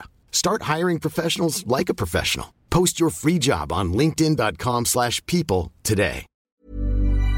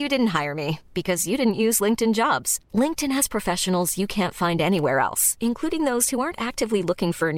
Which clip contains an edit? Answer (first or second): first